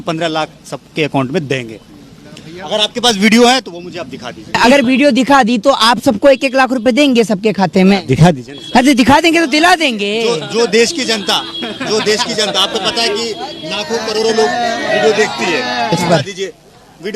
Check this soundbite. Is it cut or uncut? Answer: cut